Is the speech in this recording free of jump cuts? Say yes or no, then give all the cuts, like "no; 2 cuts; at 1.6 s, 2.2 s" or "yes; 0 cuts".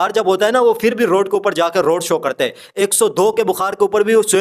yes; 0 cuts